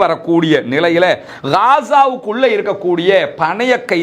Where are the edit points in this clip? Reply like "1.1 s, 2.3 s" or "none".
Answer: 1.3 s